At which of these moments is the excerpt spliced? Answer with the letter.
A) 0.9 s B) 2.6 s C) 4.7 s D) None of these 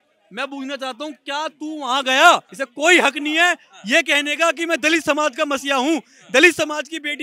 B